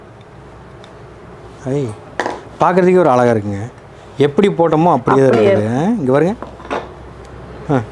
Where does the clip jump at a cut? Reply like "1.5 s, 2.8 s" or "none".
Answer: 6.4 s